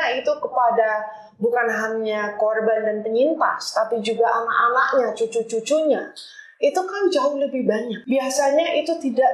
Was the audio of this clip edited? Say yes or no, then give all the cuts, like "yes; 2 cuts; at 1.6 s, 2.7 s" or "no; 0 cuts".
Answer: yes; 1 cut; at 7.9 s